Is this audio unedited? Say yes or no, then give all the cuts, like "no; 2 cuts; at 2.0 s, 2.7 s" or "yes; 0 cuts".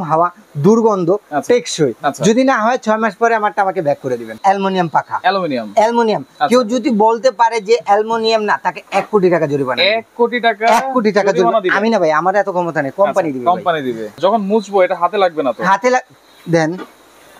no; 2 cuts; at 4.3 s, 14.2 s